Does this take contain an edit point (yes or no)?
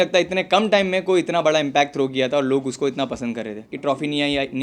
yes